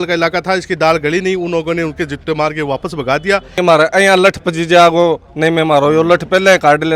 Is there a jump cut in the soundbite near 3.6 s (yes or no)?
yes